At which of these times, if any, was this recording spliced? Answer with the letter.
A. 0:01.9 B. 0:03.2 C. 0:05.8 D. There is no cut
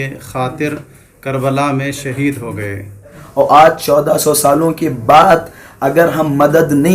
B